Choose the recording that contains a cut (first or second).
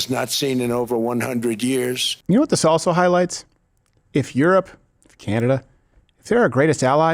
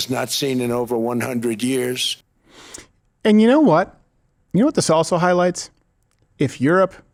first